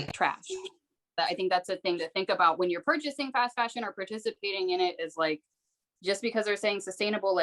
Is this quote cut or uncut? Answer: cut